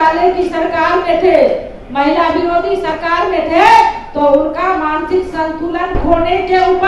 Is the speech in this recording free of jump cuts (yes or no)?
yes